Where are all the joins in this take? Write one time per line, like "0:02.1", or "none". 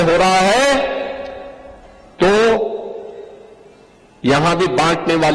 none